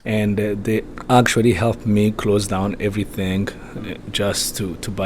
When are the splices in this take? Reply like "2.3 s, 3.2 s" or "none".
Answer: 0.9 s